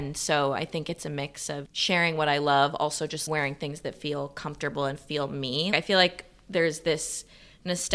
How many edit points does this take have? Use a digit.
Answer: 2